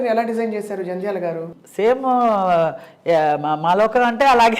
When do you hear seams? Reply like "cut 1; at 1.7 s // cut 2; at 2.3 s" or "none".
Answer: cut 1; at 1.5 s

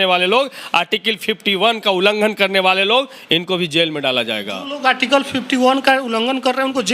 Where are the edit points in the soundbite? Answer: none

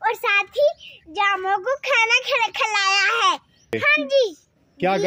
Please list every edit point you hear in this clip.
cut 1; at 3.8 s

